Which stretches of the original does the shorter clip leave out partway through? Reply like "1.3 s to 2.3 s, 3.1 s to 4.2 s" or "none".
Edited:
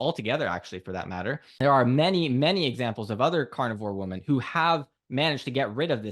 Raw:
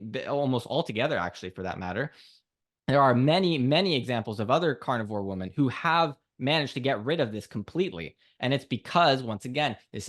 2.2 s to 2.8 s